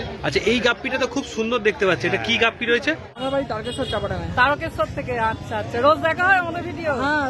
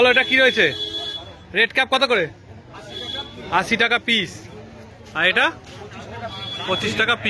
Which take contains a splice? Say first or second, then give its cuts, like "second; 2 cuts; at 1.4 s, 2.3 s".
first; 1 cut; at 3.2 s